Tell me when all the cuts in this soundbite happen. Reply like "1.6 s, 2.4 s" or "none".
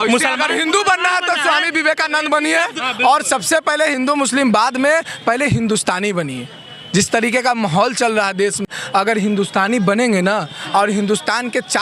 2.9 s, 8.7 s